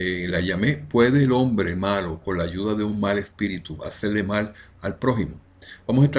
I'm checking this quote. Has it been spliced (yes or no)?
yes